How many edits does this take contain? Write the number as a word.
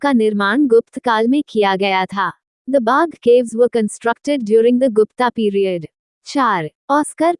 one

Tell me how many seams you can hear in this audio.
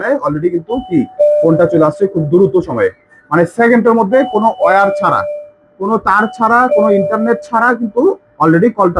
zero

